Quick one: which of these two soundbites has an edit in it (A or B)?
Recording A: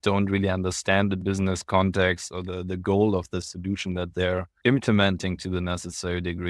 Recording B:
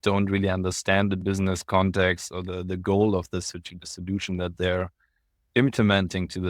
A